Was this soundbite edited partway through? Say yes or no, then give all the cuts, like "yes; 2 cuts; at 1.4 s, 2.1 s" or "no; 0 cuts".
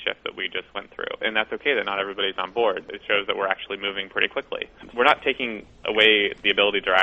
yes; 1 cut; at 4.7 s